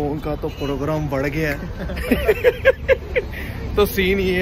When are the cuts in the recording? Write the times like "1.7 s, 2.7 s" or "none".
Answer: none